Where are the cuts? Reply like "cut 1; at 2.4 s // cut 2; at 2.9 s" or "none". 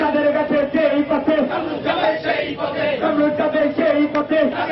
none